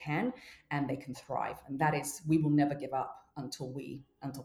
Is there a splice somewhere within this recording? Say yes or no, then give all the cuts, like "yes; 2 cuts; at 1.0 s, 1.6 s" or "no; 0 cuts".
no; 0 cuts